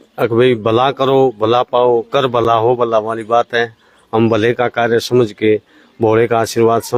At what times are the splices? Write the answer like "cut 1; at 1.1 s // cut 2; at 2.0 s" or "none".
none